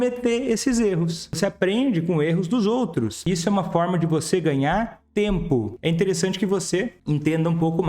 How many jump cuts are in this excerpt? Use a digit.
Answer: 5